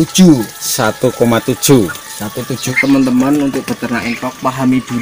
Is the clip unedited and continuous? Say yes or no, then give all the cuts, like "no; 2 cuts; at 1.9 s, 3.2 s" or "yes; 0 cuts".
no; 1 cut; at 2.7 s